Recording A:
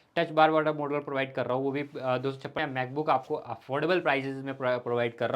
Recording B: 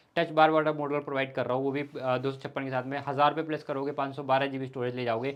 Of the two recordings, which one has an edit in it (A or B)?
A